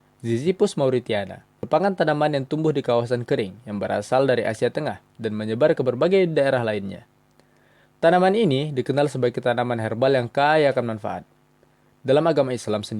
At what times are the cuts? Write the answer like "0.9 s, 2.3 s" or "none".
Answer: 1.6 s